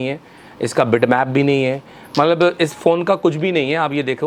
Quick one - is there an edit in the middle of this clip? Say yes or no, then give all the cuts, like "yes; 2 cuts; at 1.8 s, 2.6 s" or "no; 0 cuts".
no; 0 cuts